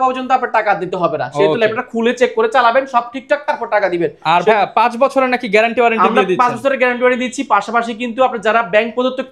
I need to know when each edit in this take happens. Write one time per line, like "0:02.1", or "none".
none